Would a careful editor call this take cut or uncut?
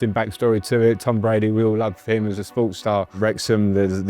cut